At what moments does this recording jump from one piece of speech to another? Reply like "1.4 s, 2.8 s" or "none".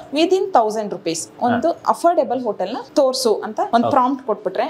1.8 s, 2.8 s, 3.7 s